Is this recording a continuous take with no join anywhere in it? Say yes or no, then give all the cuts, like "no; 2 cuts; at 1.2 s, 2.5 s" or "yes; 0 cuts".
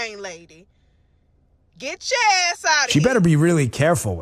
no; 1 cut; at 2.9 s